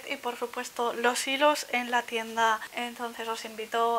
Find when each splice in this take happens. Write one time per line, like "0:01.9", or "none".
0:02.7

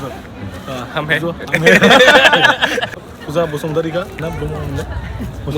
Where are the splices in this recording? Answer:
0:03.0

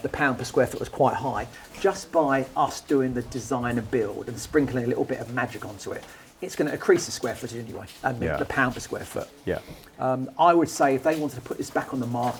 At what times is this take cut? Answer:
none

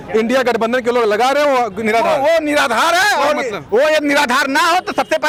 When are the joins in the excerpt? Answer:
none

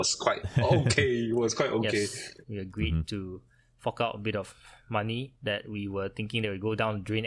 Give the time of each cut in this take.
0:02.4

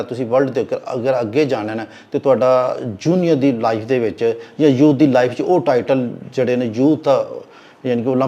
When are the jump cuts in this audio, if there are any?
none

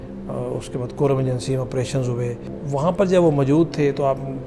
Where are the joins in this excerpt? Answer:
0:02.6

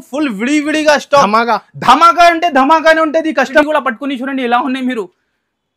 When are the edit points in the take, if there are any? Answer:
0:03.6

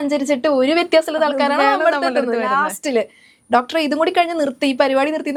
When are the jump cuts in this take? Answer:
none

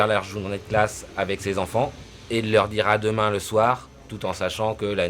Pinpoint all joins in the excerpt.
0:02.1

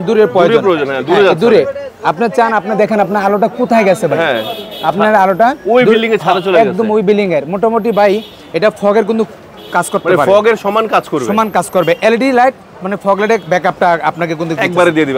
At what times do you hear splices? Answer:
none

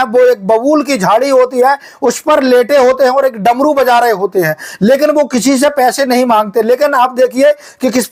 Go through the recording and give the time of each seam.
none

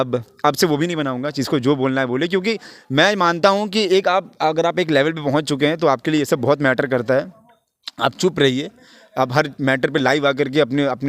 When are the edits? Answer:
none

